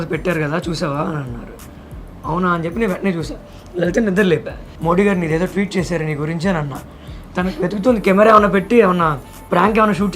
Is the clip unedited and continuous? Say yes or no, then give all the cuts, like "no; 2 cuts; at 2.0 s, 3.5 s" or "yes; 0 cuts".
no; 2 cuts; at 4.6 s, 7.1 s